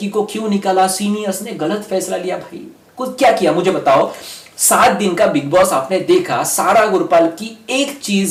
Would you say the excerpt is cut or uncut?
uncut